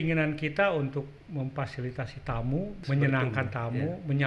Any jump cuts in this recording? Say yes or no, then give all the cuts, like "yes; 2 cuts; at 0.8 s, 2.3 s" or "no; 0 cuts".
yes; 1 cut; at 2.8 s